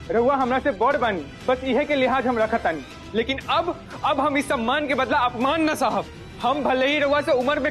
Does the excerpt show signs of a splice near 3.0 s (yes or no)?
yes